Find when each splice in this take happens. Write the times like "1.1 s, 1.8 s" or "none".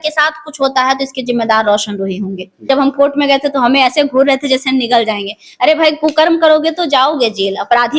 2.6 s